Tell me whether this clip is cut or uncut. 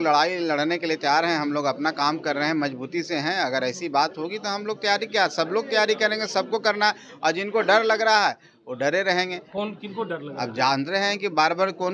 uncut